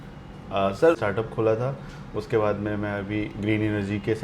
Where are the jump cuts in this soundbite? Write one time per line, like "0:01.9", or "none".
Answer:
0:01.0